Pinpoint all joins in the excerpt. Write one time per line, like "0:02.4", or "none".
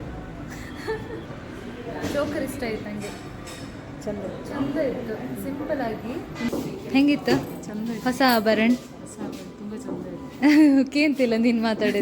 0:01.2
0:06.5

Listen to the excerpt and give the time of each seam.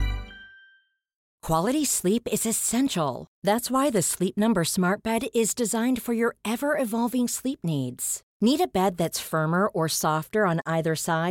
0:01.3

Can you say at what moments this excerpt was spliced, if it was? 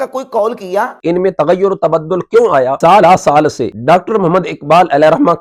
0:00.9
0:02.8
0:03.7

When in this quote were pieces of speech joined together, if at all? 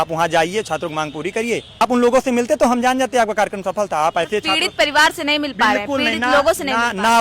0:01.8

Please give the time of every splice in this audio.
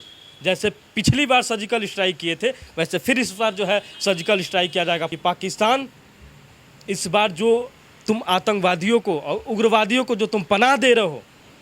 0:05.1

